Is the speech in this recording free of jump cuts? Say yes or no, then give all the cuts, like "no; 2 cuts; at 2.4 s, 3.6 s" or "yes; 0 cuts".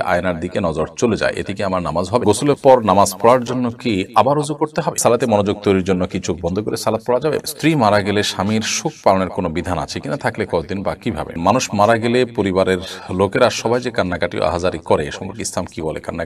no; 4 cuts; at 2.2 s, 5.0 s, 7.4 s, 11.4 s